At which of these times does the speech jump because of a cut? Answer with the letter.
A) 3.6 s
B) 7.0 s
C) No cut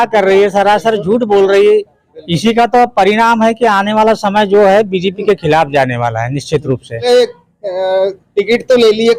B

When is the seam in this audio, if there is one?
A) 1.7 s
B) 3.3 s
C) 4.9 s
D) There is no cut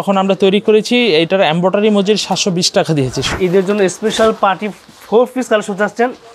B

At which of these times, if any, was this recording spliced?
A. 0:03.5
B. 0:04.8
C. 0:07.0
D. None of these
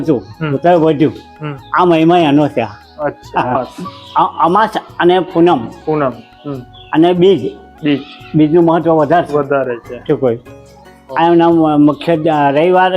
A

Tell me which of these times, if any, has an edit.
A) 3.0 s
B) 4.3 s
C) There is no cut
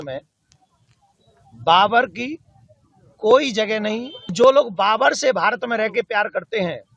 B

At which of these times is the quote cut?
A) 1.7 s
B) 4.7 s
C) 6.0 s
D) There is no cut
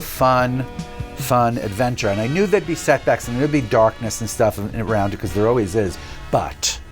C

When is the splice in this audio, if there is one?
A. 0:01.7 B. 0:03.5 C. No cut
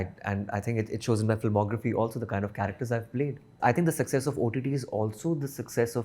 B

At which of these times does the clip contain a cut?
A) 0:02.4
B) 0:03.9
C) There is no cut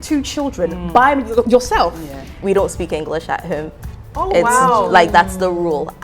A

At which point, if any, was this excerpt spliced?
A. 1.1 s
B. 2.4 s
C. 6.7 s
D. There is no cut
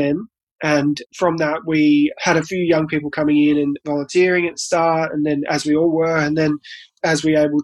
A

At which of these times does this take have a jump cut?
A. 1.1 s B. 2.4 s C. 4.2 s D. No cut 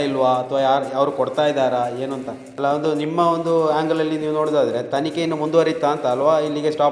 B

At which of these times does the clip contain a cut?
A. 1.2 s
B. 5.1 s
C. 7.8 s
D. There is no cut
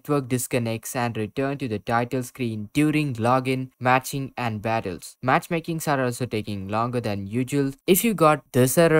C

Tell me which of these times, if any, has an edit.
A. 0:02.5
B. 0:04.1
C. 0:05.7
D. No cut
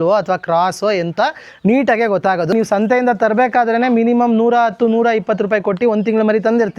A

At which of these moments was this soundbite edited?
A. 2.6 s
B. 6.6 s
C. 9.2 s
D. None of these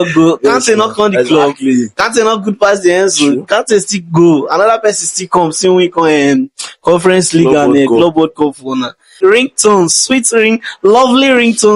C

